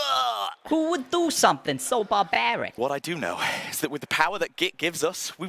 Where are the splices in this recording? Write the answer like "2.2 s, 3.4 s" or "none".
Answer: 2.7 s